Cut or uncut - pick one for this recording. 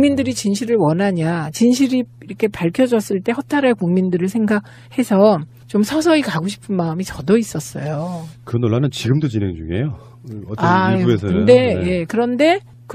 cut